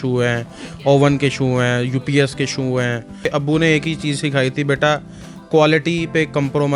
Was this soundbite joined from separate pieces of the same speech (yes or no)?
yes